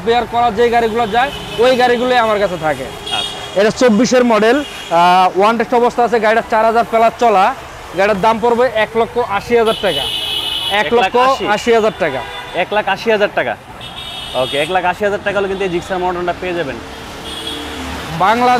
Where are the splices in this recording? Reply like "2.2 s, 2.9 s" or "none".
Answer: none

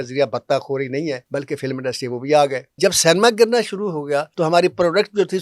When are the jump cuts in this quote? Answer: 1.2 s, 2.7 s, 4.3 s

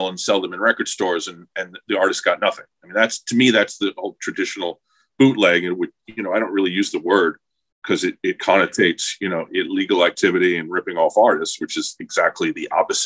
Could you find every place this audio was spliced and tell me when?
none

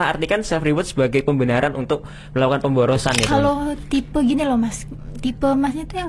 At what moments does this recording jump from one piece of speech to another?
3.2 s

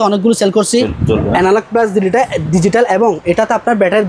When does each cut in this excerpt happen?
0.9 s

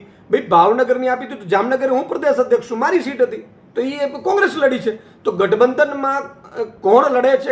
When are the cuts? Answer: none

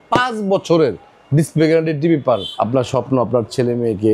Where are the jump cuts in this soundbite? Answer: 2.5 s

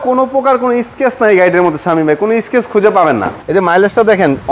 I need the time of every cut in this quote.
3.3 s

